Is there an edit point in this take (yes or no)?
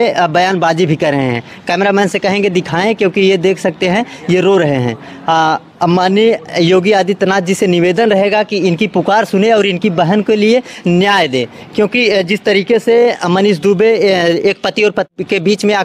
no